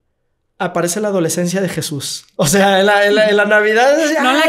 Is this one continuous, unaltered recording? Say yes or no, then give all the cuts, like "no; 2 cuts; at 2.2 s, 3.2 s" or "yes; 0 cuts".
yes; 0 cuts